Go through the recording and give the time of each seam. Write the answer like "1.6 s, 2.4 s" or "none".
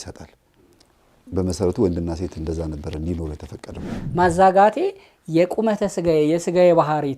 3.9 s